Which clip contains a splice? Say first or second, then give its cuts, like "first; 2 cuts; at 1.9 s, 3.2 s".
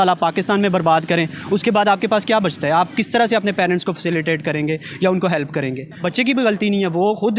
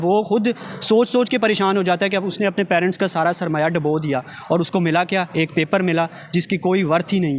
first; 1 cut; at 6.0 s